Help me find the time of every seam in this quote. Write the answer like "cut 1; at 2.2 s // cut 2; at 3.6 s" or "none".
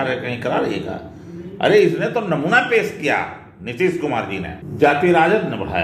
cut 1; at 4.6 s